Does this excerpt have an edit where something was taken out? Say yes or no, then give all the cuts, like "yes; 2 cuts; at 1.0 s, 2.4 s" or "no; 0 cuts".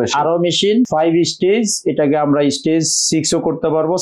yes; 1 cut; at 0.9 s